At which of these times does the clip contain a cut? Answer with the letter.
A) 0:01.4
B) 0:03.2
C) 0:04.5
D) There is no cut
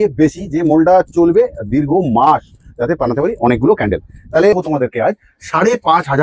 C